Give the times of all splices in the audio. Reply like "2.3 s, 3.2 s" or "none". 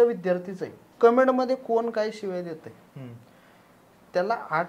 0.9 s